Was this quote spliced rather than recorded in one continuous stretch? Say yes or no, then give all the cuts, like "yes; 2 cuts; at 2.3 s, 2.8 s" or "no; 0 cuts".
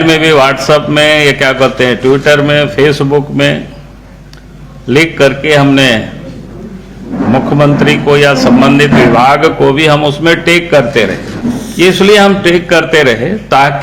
yes; 1 cut; at 11.3 s